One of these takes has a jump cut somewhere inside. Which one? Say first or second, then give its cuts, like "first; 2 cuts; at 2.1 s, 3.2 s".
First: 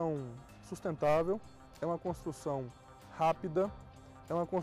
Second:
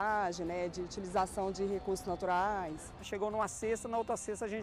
second; 1 cut; at 3.0 s